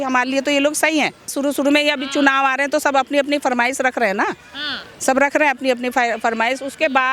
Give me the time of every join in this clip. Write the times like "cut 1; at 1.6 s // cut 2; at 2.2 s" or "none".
cut 1; at 1.3 s